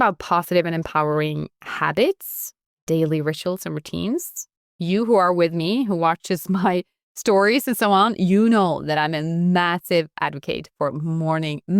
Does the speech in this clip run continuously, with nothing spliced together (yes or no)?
no